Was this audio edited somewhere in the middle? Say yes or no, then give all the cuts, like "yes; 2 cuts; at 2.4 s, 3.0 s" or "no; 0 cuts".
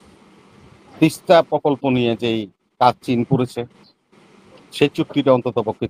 no; 0 cuts